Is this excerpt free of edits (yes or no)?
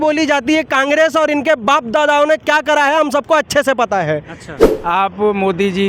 no